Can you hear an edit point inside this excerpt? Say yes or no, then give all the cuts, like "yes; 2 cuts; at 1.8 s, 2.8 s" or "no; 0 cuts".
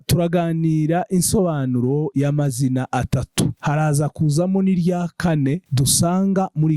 no; 0 cuts